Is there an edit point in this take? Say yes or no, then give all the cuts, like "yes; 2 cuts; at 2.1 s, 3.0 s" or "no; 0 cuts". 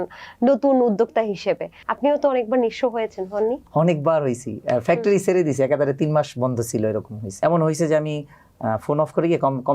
yes; 1 cut; at 7.2 s